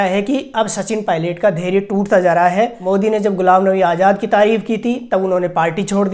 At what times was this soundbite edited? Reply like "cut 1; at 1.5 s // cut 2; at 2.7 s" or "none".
cut 1; at 2.8 s